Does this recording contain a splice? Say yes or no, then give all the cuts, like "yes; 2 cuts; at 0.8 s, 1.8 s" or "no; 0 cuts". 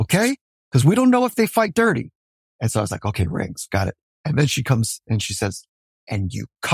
yes; 1 cut; at 2.2 s